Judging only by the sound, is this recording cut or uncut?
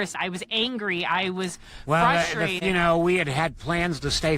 cut